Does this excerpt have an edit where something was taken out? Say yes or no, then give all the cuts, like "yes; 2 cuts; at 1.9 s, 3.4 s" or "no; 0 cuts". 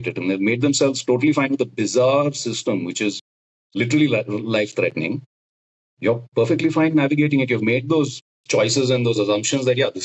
no; 0 cuts